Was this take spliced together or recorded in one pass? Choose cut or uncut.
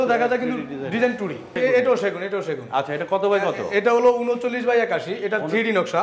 cut